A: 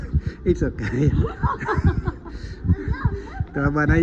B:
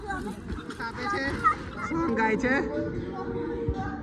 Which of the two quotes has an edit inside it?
B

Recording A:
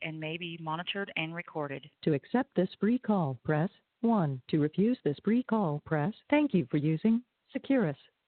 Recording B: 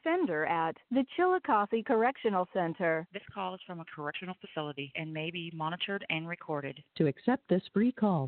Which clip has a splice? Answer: A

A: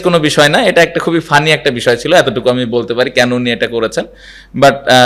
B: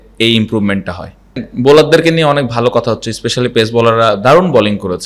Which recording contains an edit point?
B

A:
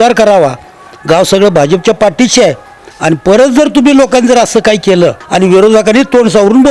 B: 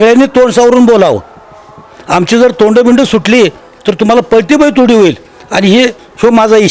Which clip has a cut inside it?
A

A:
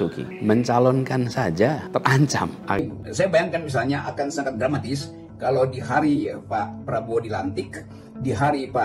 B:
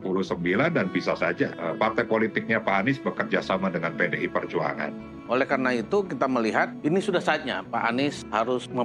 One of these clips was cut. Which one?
A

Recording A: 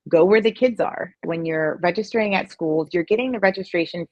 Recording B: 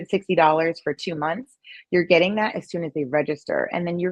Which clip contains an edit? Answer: A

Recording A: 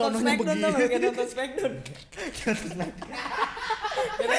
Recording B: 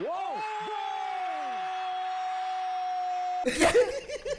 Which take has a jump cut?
B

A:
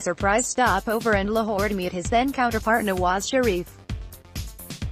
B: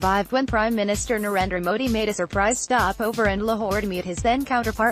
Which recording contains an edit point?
A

